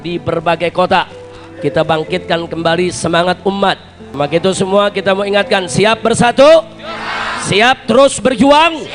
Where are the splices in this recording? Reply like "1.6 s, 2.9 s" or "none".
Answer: 4.0 s